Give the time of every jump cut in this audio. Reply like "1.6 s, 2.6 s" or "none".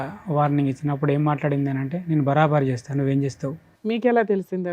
3.7 s